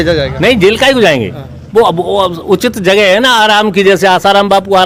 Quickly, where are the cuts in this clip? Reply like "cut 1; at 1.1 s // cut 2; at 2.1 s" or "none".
none